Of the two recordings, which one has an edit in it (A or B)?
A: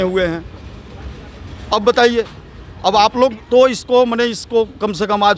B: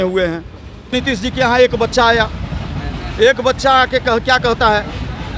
B